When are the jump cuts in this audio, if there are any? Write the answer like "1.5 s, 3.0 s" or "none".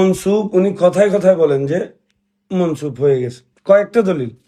none